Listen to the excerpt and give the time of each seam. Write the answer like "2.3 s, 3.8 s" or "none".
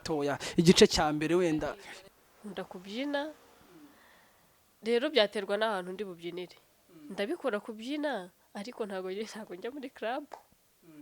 1.9 s